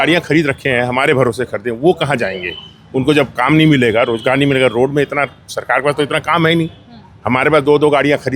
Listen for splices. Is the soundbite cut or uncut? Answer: uncut